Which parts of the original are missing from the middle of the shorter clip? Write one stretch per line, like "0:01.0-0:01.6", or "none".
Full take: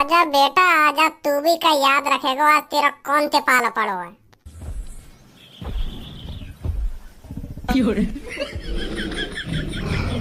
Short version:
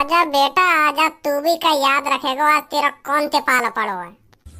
none